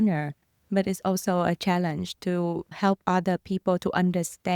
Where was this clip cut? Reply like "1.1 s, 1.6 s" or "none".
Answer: 2.7 s